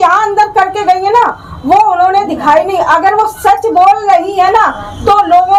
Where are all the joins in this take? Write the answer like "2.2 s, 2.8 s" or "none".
none

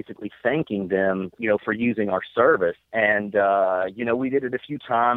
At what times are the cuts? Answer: 1.4 s, 2.8 s

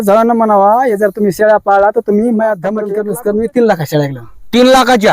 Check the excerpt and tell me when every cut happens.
2.8 s

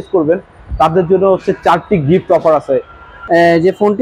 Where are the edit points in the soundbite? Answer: 3.1 s

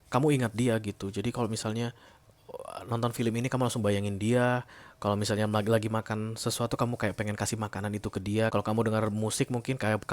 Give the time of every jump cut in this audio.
8.5 s

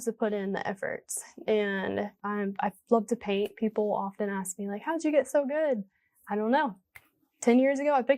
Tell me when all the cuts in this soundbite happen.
2.2 s

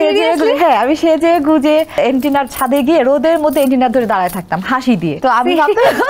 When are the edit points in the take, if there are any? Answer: 1.9 s, 5.2 s

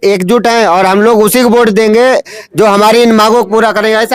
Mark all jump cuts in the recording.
none

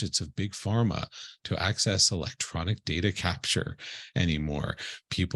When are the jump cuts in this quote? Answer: none

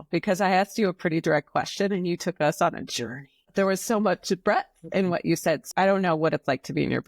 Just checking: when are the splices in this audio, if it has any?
3.4 s, 5.6 s

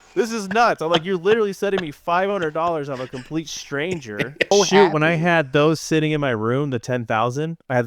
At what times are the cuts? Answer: 4.5 s

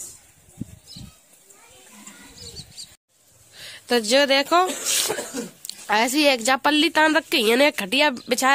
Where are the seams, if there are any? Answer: none

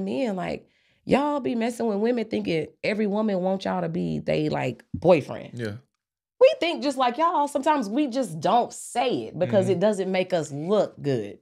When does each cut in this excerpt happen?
none

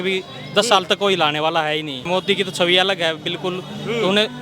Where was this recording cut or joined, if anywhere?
2.1 s

